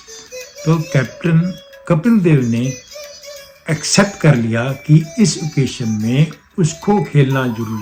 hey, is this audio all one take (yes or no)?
yes